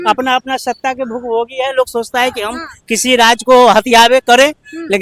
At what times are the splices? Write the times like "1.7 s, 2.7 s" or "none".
none